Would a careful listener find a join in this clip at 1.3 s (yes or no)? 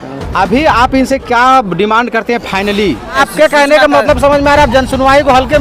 no